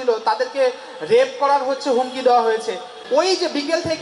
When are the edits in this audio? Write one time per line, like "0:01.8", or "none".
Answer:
0:02.9